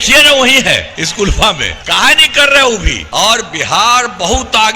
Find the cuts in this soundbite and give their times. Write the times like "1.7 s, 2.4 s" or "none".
1.0 s, 1.7 s, 3.0 s

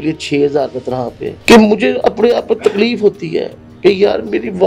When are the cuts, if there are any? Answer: 1.3 s

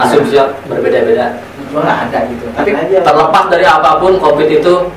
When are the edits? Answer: 2.7 s

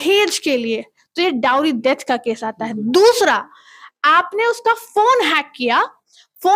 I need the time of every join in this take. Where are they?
none

